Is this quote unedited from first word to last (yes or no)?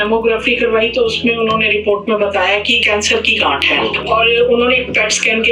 no